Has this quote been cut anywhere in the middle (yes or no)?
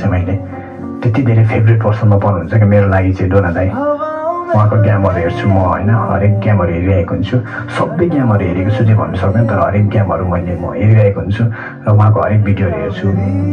no